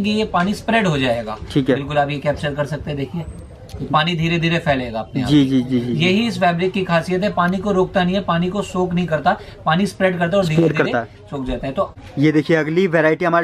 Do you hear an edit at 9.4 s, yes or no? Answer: no